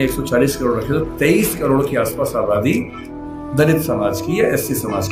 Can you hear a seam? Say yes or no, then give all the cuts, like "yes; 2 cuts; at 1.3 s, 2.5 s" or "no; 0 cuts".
no; 0 cuts